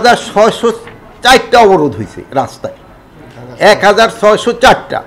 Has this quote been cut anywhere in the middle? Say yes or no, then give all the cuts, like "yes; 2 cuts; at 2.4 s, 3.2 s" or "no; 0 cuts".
no; 0 cuts